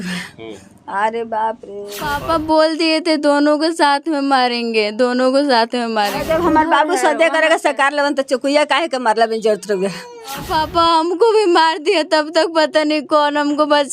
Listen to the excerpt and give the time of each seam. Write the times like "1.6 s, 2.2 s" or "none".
2.2 s, 6.2 s, 10.5 s